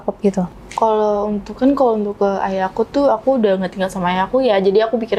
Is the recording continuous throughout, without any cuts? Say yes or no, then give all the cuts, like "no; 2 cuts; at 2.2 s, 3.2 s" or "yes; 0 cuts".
yes; 0 cuts